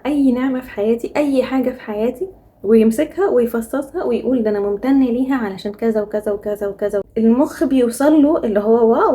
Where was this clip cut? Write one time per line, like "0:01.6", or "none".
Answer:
0:07.2